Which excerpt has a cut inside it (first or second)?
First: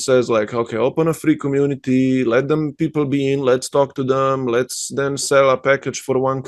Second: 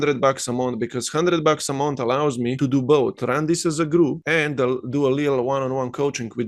second